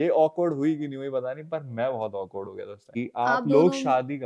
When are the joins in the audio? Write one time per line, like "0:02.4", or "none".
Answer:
0:03.0